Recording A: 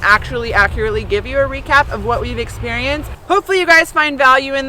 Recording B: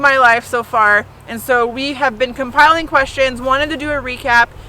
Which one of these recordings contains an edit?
A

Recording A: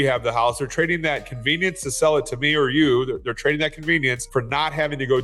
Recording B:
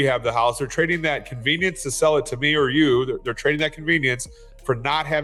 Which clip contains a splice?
A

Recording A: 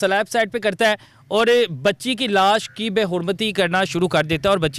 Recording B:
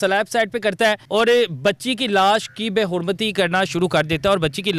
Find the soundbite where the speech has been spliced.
B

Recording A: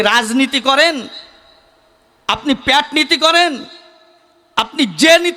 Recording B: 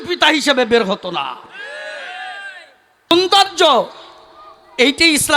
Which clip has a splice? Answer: B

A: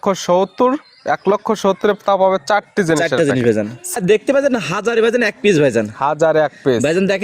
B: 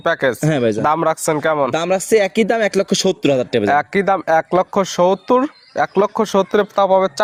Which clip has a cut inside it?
A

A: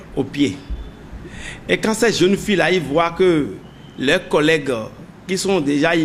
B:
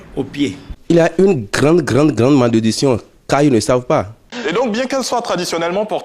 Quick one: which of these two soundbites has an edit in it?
B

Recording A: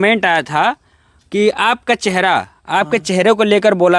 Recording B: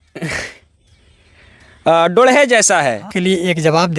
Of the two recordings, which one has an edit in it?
B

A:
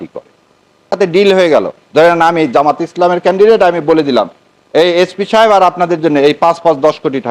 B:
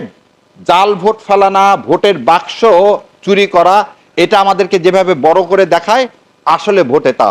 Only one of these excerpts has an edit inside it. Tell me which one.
A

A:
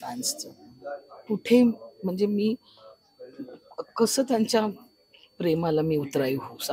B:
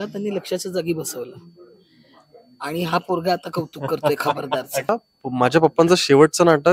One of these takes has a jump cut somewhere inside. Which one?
B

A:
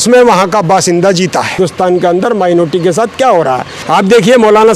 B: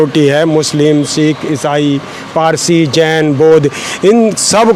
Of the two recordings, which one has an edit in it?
A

